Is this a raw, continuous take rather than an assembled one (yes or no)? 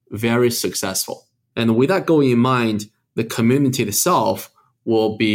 no